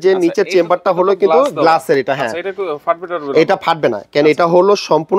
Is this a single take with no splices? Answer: yes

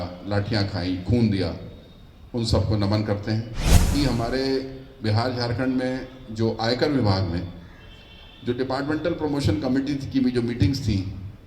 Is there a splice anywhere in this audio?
yes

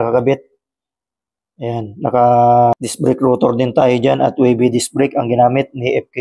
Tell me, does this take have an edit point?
yes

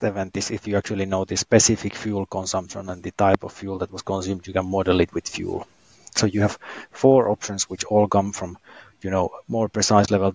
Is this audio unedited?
yes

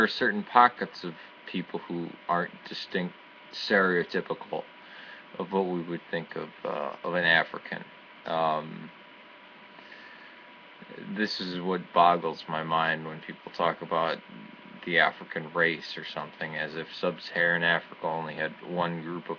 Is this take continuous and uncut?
yes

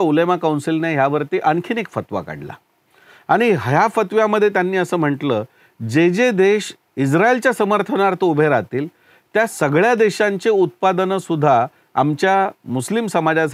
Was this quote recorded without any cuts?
yes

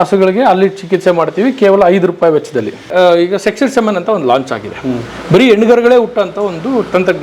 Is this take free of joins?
no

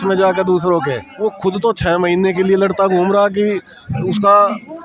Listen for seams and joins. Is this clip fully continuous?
no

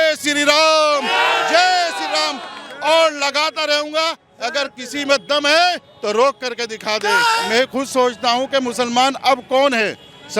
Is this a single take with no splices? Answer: no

